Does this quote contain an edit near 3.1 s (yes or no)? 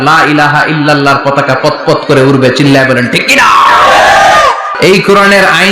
no